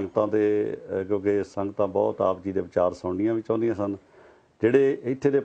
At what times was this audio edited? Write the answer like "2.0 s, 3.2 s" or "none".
none

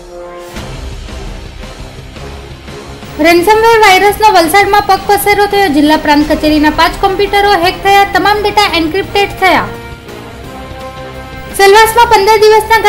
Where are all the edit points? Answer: 3.0 s

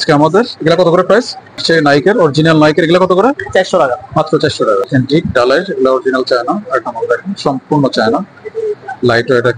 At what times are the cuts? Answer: 1.6 s, 4.9 s

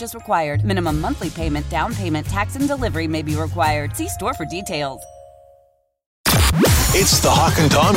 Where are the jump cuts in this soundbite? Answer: 6.2 s

